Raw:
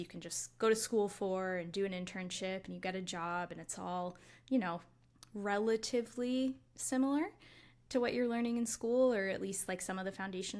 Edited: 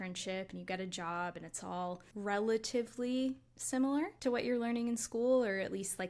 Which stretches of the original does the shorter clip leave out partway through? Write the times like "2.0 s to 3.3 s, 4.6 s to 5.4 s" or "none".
4.2 s to 5.3 s, 7.3 s to 7.8 s